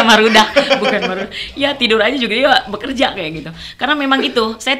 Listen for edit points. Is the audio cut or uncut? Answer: uncut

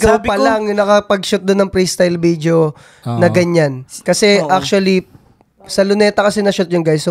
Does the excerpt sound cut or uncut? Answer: uncut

